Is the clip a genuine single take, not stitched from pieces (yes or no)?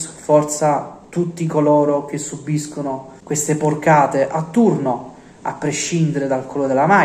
no